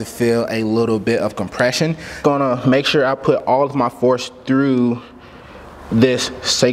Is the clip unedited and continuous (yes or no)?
no